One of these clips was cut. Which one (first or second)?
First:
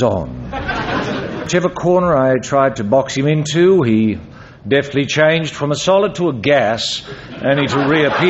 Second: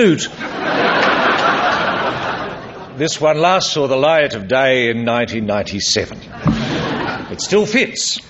first